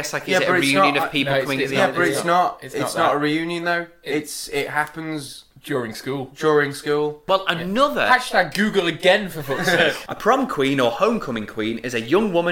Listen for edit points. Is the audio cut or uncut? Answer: cut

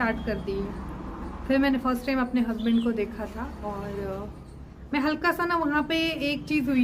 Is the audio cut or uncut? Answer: uncut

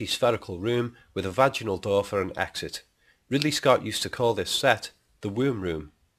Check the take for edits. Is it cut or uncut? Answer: uncut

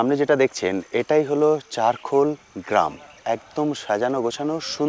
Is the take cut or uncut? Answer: uncut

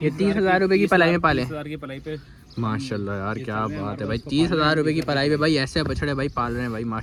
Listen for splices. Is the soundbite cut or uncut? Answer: uncut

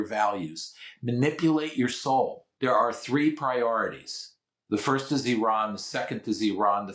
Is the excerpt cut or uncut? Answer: cut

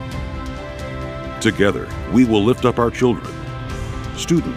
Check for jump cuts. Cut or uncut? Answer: cut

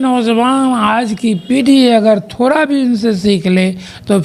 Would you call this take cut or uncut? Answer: uncut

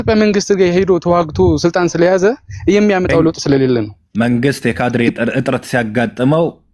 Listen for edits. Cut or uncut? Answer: cut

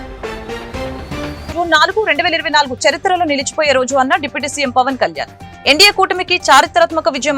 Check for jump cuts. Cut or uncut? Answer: cut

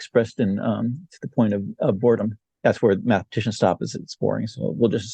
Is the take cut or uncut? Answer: cut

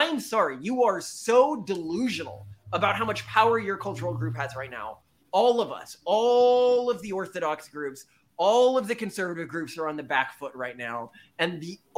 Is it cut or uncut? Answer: uncut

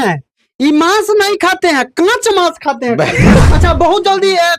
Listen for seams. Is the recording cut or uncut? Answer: cut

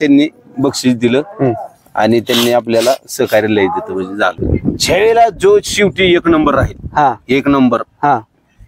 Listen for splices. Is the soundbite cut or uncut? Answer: cut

